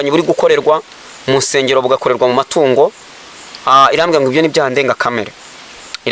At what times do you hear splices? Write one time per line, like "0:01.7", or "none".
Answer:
none